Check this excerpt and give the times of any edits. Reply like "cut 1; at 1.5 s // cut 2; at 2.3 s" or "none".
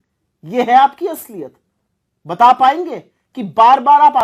none